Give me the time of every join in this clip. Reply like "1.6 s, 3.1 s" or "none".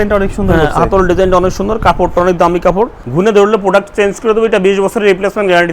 3.0 s